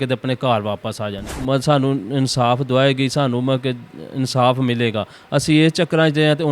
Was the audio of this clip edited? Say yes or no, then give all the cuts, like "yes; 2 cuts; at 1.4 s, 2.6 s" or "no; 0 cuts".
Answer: yes; 1 cut; at 1.4 s